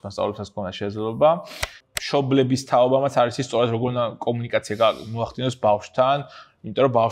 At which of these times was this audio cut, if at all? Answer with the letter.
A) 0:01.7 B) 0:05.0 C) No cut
A